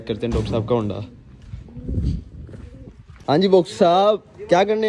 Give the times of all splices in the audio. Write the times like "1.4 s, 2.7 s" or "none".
3.0 s

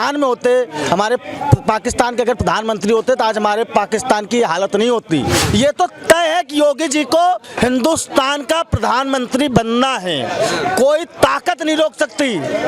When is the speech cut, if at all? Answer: 5.4 s

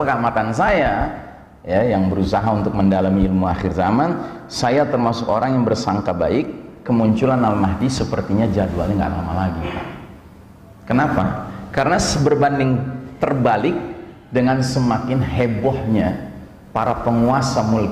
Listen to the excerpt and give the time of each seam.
none

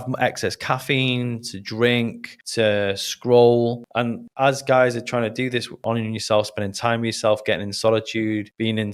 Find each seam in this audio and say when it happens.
none

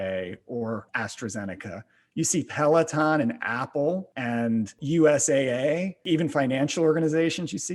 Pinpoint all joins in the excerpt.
1.0 s, 4.7 s, 6.0 s

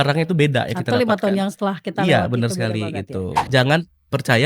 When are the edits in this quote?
3.5 s

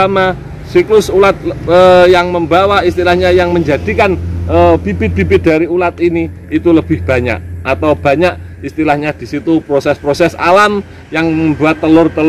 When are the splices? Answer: none

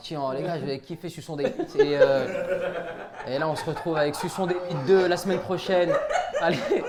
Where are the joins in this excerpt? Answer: none

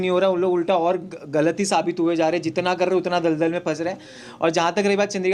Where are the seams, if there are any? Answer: none

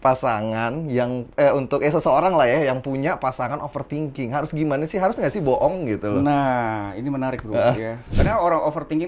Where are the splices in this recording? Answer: 8.0 s

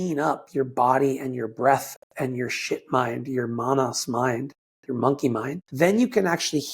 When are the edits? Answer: 5.6 s

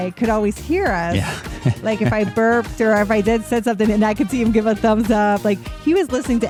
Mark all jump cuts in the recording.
none

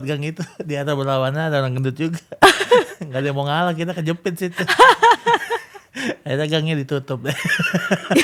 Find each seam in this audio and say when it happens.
none

